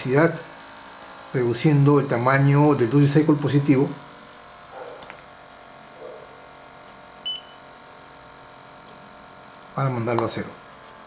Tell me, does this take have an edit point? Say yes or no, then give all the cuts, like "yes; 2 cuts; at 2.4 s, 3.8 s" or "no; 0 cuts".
no; 0 cuts